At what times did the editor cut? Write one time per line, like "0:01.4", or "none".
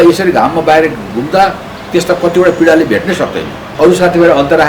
0:03.7